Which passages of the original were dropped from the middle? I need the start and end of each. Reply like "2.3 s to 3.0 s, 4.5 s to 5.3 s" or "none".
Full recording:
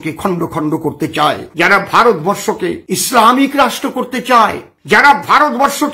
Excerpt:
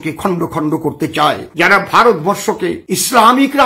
none